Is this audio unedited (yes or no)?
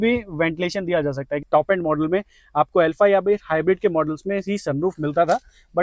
no